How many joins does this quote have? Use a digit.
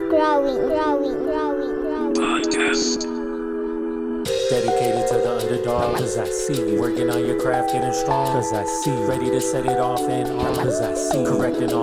0